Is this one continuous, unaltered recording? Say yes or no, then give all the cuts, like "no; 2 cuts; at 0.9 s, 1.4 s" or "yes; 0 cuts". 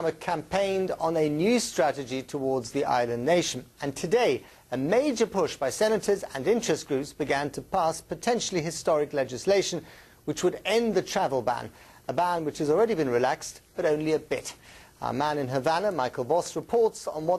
yes; 0 cuts